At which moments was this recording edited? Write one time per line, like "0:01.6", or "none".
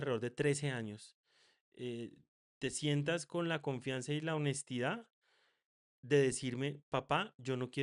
none

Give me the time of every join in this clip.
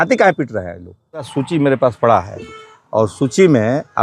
0:01.3

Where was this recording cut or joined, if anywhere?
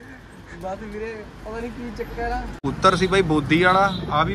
0:02.6

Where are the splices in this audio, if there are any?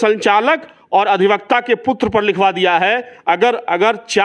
0:03.1

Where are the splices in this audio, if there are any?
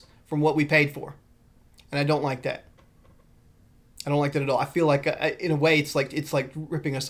none

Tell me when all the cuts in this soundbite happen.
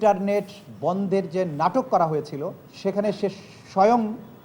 0:02.6

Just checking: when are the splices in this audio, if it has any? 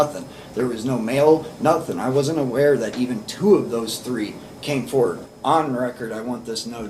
0:05.2

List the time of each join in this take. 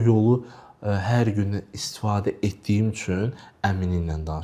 none

